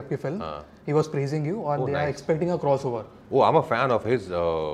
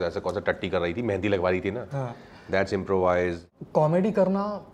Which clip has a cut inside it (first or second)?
second